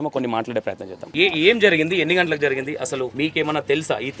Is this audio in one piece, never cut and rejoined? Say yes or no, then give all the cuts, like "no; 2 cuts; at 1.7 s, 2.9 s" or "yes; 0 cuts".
no; 2 cuts; at 1.0 s, 3.1 s